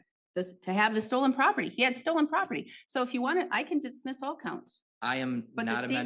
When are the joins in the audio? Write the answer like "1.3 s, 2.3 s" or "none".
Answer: none